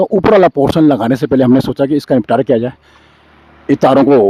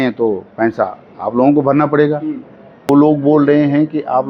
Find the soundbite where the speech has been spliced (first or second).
second